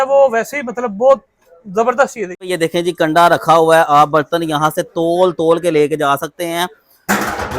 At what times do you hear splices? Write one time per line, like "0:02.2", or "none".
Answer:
0:02.4

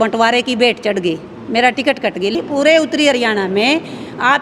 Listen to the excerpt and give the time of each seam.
0:02.3

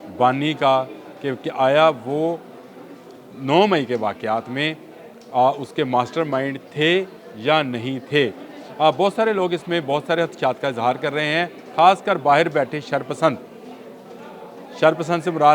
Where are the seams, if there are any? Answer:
none

